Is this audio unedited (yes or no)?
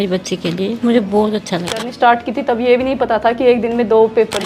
no